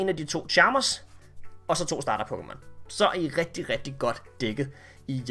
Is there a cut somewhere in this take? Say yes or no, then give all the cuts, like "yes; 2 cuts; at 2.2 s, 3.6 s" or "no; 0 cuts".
no; 0 cuts